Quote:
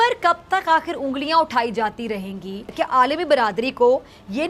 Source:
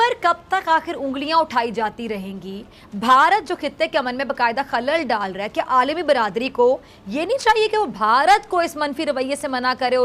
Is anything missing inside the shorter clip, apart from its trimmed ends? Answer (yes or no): yes